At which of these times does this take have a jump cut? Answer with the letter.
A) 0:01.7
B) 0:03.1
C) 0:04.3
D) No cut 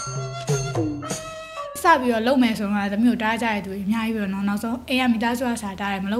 A